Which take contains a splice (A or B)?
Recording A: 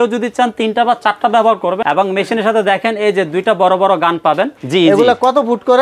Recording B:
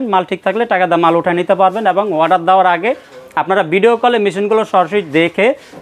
A